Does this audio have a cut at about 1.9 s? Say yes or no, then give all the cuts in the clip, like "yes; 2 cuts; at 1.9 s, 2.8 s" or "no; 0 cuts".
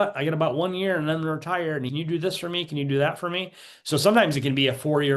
yes; 1 cut; at 1.9 s